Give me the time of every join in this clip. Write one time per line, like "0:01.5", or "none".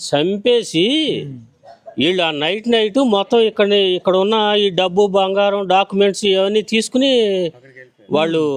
none